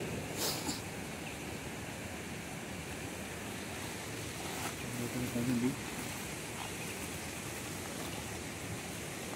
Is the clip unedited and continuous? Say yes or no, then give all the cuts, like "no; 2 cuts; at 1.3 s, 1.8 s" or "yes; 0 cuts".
yes; 0 cuts